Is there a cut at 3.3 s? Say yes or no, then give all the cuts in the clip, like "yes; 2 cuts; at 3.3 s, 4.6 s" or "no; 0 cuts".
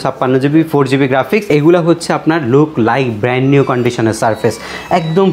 no; 1 cut; at 1.5 s